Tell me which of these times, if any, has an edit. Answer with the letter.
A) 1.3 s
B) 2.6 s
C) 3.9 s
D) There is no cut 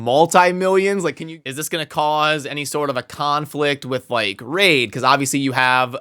A